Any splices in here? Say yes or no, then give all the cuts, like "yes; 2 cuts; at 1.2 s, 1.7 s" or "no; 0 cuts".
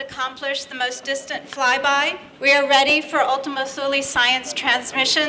yes; 1 cut; at 2.3 s